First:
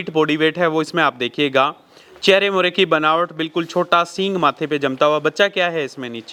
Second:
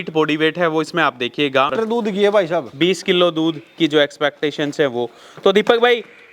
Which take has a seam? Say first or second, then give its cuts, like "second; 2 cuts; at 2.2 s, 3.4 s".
second; 1 cut; at 1.7 s